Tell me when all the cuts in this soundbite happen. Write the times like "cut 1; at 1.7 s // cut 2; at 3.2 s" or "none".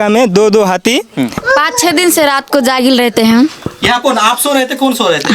cut 1; at 1.4 s